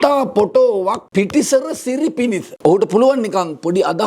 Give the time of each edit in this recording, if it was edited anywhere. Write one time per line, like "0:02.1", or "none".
0:01.0
0:02.5